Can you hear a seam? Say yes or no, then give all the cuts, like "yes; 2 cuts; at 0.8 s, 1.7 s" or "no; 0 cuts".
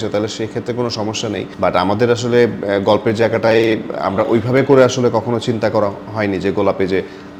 no; 0 cuts